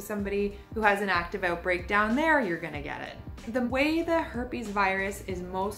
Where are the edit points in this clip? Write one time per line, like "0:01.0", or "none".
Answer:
0:03.5